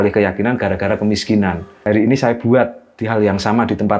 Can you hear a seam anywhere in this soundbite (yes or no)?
yes